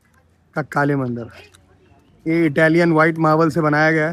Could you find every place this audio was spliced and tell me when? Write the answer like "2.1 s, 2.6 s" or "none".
none